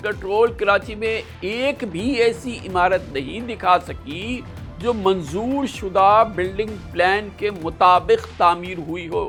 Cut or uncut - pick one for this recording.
uncut